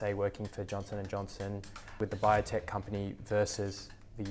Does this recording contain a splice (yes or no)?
yes